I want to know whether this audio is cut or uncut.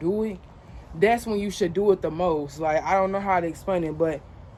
uncut